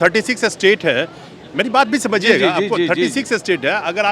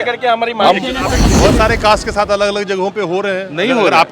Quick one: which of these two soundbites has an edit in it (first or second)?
second